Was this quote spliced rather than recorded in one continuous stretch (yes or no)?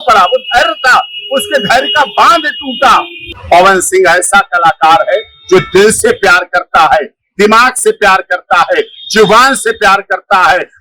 yes